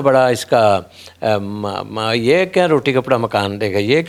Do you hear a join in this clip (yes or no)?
no